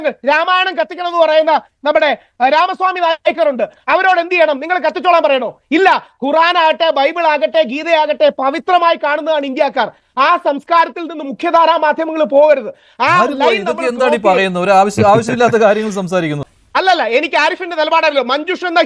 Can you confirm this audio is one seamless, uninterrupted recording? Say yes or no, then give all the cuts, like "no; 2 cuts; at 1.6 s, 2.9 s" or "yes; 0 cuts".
no; 1 cut; at 16.5 s